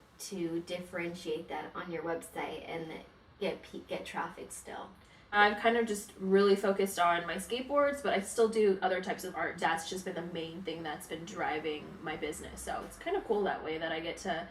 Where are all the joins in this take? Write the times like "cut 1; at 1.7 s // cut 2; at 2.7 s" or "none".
cut 1; at 5.3 s // cut 2; at 9.5 s